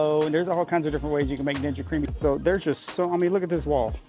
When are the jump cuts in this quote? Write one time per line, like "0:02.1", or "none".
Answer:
0:02.1